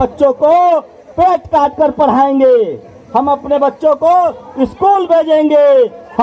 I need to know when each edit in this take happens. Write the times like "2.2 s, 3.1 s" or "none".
none

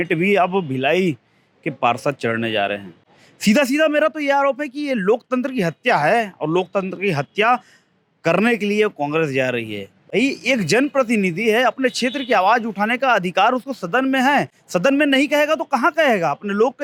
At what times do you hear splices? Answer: none

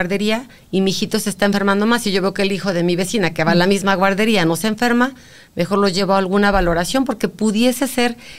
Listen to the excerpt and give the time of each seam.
none

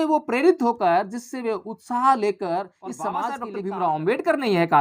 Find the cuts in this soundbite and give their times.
3.4 s

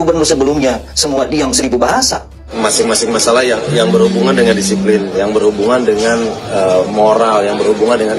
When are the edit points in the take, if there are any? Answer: 2.5 s

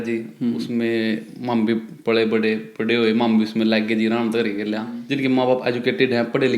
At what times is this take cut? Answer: 5.0 s

